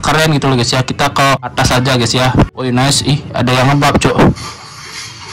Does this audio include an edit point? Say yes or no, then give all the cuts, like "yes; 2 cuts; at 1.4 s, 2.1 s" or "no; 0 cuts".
yes; 2 cuts; at 1.5 s, 2.6 s